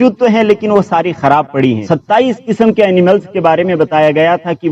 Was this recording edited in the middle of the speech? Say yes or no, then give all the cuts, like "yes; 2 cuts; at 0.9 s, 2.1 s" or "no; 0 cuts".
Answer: yes; 1 cut; at 1.8 s